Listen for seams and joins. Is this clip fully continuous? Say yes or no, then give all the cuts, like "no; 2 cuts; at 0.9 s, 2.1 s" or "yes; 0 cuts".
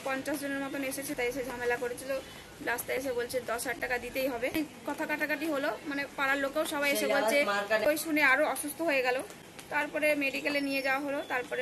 no; 3 cuts; at 1.1 s, 4.6 s, 7.9 s